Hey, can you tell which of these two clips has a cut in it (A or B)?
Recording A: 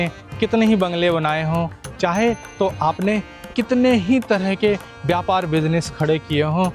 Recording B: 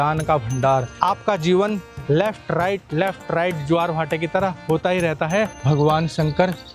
B